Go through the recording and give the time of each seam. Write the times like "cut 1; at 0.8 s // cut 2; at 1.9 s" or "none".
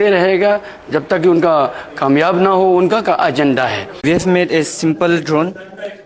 cut 1; at 3.9 s